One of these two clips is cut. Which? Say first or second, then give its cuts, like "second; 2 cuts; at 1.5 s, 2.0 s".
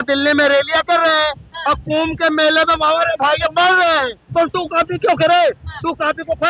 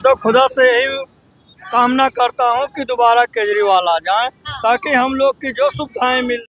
first; 1 cut; at 4.2 s